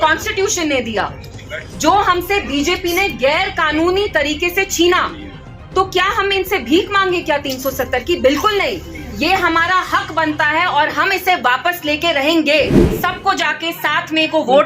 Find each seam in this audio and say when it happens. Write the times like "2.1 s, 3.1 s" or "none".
12.8 s